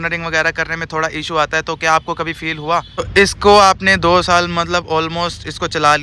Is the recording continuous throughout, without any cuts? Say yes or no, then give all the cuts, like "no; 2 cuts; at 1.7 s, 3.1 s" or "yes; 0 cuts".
no; 1 cut; at 3.1 s